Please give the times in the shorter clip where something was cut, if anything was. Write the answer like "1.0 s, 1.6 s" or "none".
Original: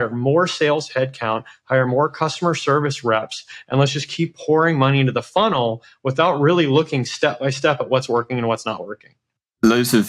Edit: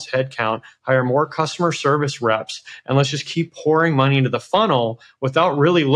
none